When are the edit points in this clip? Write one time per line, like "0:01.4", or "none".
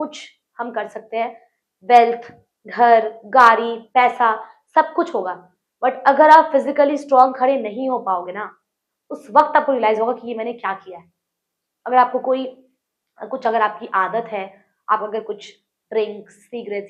none